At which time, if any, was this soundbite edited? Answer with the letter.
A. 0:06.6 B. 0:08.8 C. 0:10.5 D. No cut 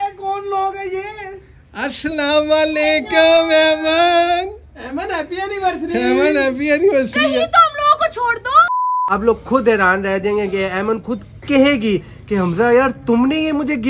B